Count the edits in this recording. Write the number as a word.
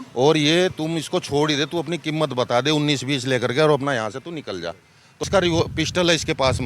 one